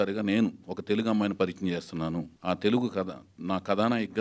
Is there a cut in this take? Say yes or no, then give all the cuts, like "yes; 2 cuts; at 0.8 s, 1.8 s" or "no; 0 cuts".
yes; 1 cut; at 2.3 s